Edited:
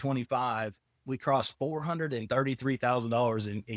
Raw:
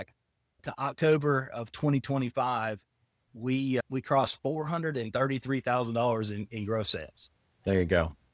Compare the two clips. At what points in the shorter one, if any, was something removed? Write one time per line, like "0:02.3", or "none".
0:01.0